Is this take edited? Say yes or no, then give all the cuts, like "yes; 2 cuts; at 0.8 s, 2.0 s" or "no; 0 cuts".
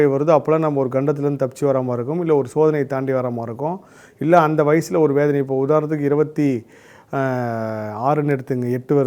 no; 0 cuts